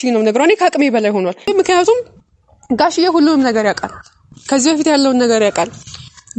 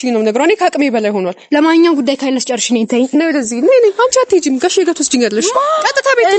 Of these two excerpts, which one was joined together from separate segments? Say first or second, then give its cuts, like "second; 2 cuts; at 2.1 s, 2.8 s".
first; 1 cut; at 1.5 s